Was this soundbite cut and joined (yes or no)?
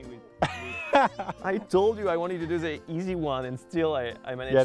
yes